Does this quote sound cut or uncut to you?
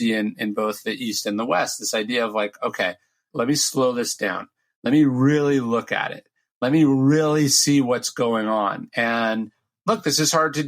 cut